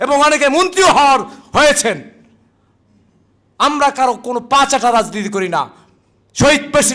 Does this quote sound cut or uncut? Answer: uncut